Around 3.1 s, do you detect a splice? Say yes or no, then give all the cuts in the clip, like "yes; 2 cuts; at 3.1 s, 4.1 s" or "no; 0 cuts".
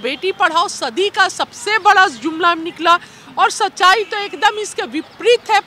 no; 0 cuts